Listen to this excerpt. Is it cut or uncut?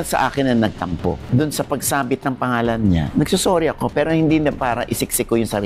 cut